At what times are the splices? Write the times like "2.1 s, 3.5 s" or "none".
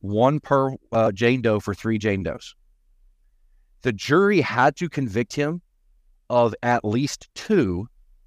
none